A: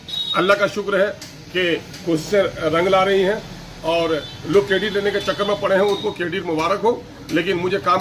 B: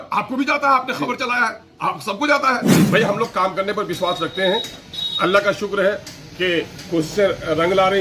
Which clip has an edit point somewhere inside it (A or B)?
B